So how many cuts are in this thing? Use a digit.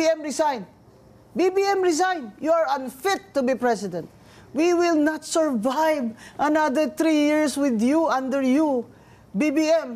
0